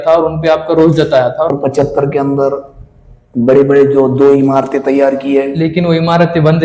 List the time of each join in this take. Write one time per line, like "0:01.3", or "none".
0:01.5